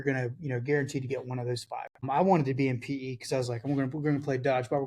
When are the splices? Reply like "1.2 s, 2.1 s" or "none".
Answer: 2.0 s